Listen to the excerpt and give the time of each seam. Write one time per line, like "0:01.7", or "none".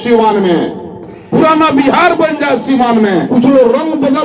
0:03.3